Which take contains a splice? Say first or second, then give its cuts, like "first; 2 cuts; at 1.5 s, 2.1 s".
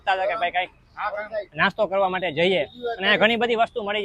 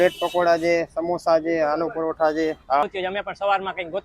second; 1 cut; at 2.9 s